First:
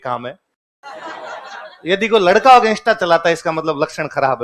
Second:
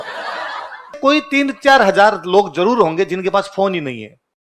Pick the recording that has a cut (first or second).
second